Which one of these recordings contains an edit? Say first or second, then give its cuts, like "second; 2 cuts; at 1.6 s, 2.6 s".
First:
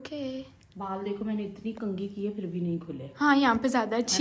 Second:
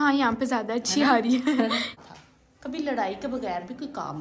second; 1 cut; at 1.9 s